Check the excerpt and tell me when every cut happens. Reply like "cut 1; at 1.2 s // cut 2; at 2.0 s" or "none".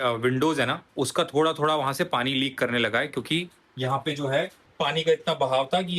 none